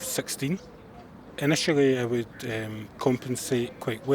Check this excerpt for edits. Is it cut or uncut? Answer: cut